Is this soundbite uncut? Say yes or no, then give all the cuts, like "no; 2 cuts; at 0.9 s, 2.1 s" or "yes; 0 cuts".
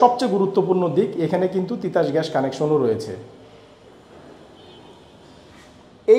no; 1 cut; at 3.9 s